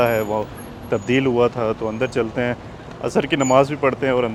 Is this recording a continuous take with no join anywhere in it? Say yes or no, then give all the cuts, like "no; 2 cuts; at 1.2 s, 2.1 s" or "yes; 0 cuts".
yes; 0 cuts